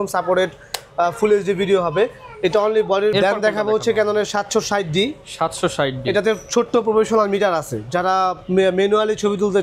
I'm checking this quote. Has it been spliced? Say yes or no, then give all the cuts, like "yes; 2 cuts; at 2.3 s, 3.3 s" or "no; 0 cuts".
yes; 1 cut; at 3.1 s